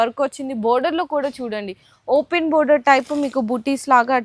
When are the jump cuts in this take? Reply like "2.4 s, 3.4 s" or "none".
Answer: none